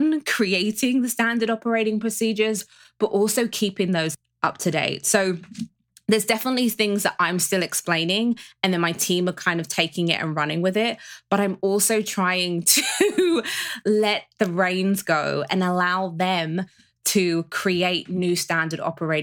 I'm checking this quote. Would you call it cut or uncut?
cut